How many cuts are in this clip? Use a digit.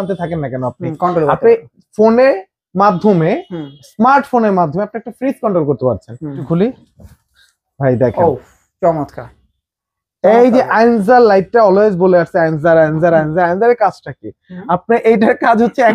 1